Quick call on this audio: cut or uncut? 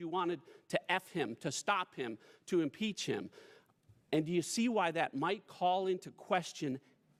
uncut